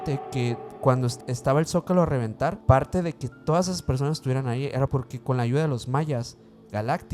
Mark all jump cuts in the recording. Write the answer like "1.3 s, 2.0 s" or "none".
1.1 s, 2.6 s, 4.9 s